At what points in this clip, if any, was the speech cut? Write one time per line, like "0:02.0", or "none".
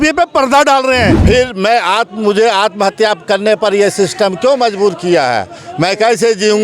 0:01.2